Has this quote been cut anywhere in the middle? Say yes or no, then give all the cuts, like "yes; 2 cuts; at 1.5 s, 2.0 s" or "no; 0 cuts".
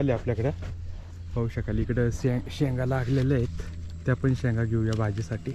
no; 0 cuts